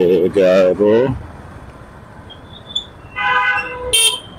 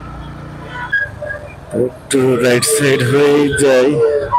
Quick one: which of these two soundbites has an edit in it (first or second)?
second